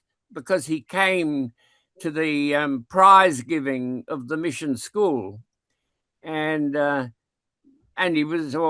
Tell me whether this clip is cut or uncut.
uncut